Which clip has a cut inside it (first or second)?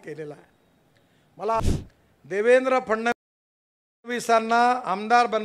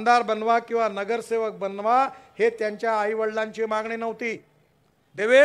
first